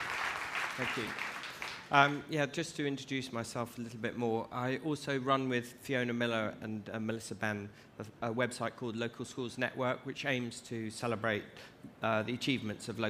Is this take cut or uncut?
uncut